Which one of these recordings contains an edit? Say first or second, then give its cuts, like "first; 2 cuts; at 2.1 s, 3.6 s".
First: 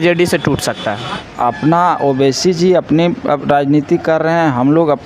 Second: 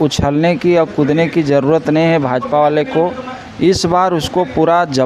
first; 1 cut; at 1.2 s